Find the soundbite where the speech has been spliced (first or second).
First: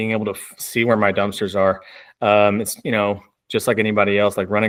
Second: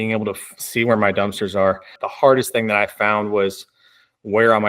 second